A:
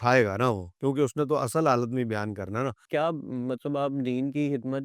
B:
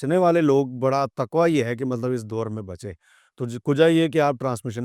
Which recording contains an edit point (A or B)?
A